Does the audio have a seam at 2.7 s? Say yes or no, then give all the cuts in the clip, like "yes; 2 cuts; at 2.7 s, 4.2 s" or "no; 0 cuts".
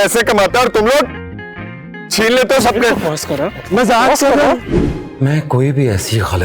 no; 1 cut; at 4.8 s